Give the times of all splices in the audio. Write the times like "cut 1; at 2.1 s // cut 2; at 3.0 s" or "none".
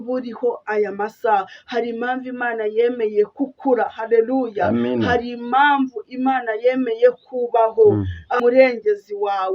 cut 1; at 8.3 s